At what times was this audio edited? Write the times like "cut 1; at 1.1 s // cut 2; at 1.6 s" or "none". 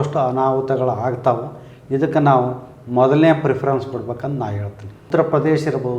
cut 1; at 5.0 s